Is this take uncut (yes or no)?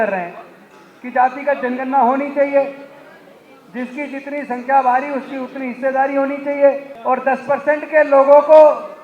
no